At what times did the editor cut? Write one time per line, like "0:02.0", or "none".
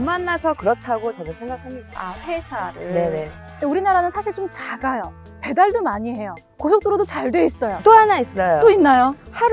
0:03.5
0:07.8